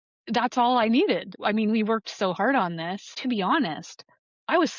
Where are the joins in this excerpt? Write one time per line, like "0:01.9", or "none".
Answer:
0:01.3
0:03.2